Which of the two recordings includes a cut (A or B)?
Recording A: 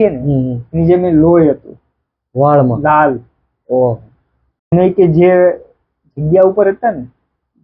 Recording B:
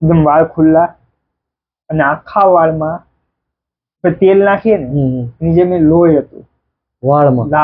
A